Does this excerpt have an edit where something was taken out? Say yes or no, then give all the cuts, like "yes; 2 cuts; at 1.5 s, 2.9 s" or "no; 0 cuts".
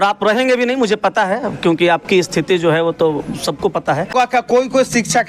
yes; 1 cut; at 4.1 s